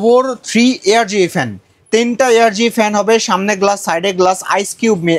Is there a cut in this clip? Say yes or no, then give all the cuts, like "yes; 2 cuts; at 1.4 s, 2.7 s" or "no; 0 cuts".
no; 0 cuts